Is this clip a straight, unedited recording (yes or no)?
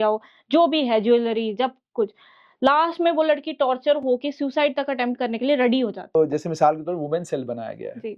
no